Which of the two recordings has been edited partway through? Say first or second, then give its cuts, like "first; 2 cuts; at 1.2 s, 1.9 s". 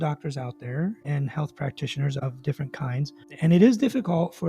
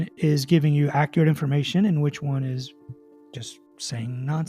first; 2 cuts; at 1.0 s, 2.2 s